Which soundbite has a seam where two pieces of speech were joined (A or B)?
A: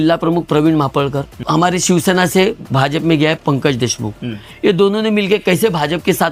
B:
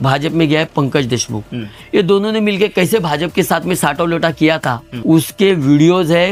A